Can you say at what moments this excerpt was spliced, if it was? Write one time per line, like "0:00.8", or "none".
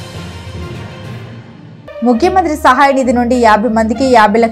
0:02.0